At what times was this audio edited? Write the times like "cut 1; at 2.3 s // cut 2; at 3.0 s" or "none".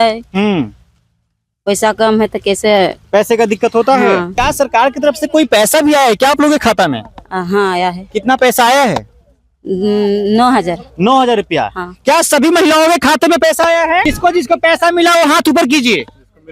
cut 1; at 4.3 s // cut 2; at 14.1 s